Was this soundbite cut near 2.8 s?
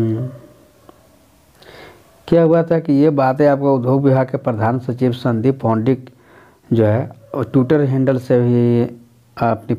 no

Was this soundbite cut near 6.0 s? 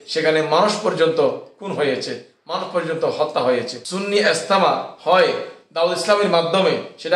no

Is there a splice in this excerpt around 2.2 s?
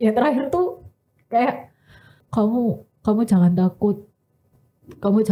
yes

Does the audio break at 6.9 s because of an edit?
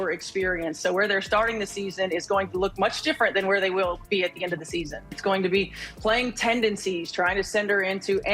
no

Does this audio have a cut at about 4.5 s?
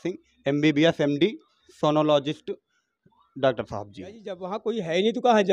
yes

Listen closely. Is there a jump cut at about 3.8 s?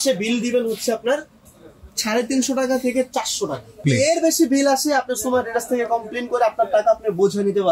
yes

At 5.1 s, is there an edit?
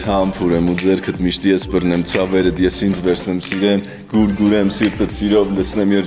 no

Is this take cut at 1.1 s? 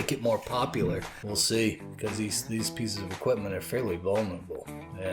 yes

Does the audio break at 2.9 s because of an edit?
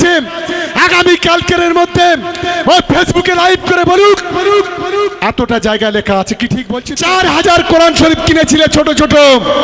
no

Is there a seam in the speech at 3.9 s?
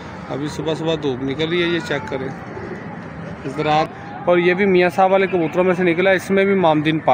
yes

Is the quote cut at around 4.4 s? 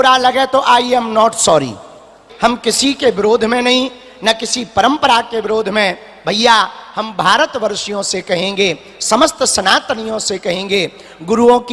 no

